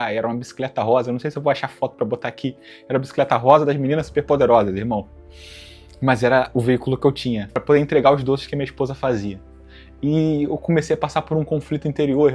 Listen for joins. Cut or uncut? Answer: cut